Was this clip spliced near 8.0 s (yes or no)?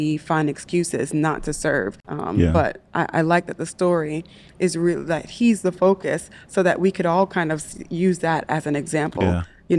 no